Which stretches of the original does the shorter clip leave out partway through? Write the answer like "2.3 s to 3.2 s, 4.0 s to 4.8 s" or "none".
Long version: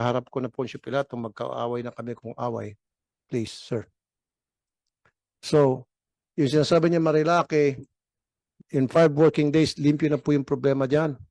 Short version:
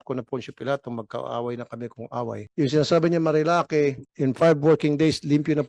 2.7 s to 6.2 s, 7.9 s to 8.6 s